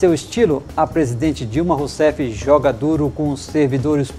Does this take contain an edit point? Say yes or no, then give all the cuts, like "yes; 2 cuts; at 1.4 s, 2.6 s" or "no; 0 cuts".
no; 0 cuts